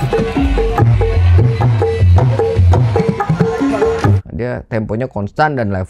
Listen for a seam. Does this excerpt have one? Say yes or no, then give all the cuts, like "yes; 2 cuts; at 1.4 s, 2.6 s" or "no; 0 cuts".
yes; 3 cuts; at 1.7 s, 3.0 s, 4.2 s